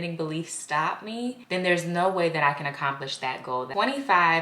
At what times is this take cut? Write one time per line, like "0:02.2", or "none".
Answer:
0:01.4
0:03.7